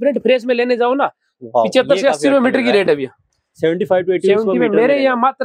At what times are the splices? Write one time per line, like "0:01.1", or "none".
none